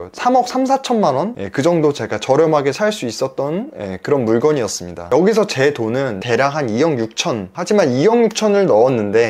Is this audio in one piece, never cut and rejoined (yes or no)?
no